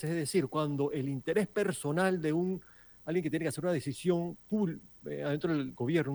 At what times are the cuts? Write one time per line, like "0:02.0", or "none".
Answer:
none